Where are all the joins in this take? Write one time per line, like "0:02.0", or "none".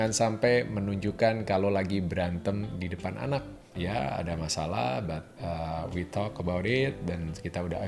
0:03.7